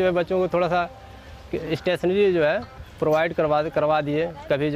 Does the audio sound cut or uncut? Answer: uncut